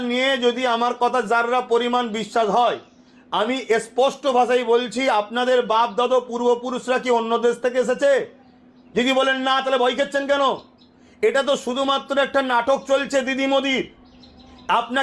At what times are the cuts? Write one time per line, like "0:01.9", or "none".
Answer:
none